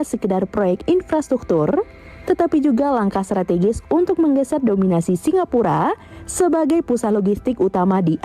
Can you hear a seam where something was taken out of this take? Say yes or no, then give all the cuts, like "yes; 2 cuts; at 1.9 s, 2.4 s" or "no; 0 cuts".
no; 0 cuts